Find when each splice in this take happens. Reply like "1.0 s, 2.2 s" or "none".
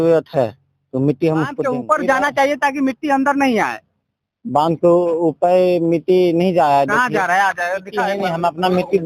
1.6 s, 8.1 s